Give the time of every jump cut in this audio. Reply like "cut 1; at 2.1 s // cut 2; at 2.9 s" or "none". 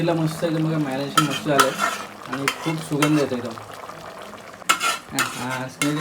cut 1; at 4.6 s